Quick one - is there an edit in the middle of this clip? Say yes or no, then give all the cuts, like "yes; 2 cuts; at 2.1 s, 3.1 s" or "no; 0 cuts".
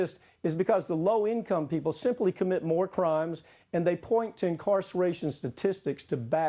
no; 0 cuts